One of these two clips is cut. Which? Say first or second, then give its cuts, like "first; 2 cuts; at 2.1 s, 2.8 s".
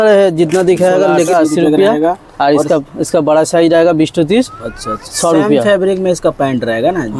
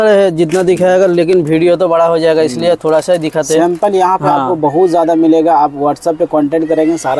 first; 1 cut; at 1.3 s